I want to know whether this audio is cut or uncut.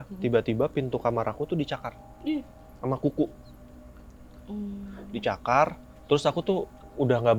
uncut